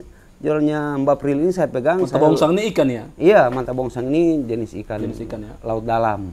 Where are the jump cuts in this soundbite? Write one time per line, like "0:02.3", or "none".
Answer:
none